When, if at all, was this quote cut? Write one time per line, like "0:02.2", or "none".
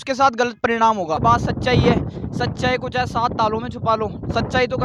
0:01.2